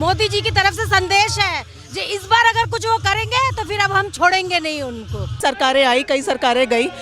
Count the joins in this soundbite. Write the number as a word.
one